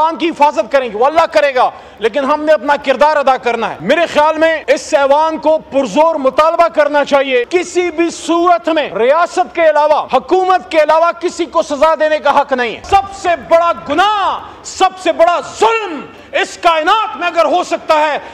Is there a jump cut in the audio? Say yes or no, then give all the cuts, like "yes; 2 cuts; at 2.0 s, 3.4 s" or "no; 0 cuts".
yes; 6 cuts; at 3.8 s, 4.6 s, 7.5 s, 8.9 s, 10.0 s, 12.8 s